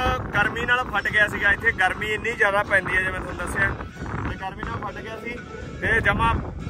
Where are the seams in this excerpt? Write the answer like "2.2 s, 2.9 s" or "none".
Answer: none